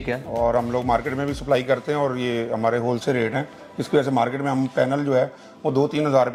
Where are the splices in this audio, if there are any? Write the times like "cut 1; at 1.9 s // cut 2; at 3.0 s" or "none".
none